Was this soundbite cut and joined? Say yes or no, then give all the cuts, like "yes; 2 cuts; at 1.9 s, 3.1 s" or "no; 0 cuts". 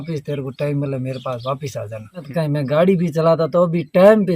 yes; 1 cut; at 2.3 s